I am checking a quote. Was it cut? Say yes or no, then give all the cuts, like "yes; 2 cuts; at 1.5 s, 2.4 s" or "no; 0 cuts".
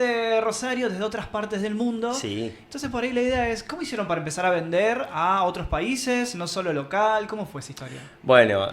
no; 0 cuts